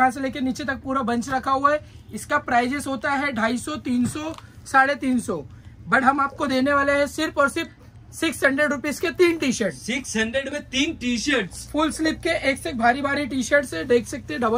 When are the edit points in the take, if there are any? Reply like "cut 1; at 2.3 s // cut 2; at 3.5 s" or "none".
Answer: none